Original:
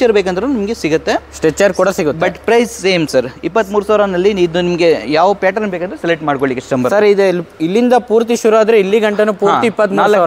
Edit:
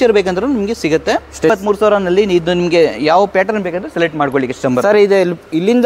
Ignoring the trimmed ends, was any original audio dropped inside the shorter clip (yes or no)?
yes